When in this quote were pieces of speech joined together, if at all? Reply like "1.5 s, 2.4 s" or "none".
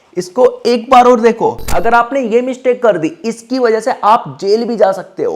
1.6 s